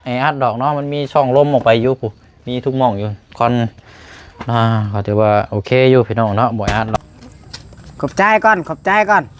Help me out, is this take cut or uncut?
cut